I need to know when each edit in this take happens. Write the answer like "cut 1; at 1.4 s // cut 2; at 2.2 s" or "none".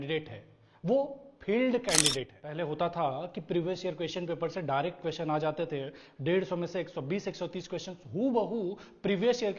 cut 1; at 2.4 s